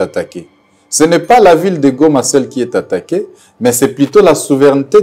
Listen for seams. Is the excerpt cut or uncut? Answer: uncut